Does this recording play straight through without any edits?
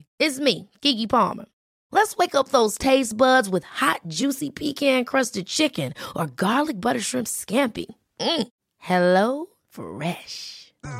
yes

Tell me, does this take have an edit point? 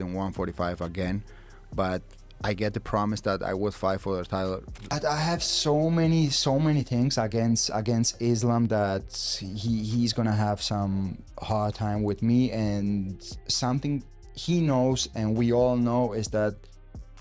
yes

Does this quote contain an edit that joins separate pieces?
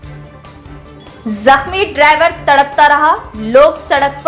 no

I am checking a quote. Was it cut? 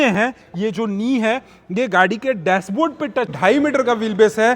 yes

